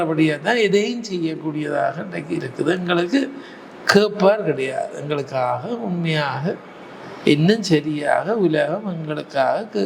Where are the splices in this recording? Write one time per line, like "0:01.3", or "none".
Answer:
none

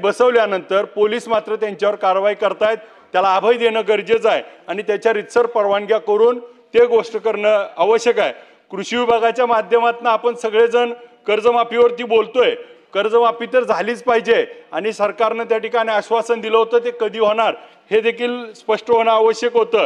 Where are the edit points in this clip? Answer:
none

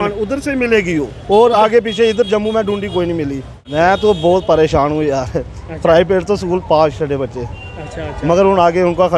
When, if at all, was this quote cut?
0:03.5

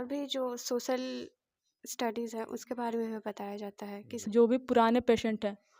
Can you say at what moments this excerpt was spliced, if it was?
0:04.1

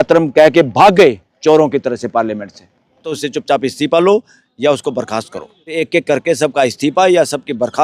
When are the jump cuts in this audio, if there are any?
0:03.2
0:05.7

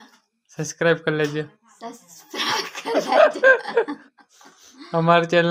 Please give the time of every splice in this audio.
0:03.7

